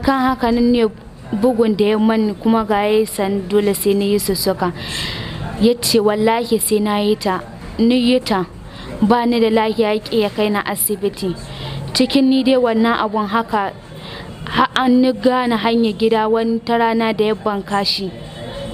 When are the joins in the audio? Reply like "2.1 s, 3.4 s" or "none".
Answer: none